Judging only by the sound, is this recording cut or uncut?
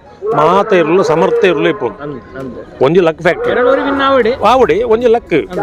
uncut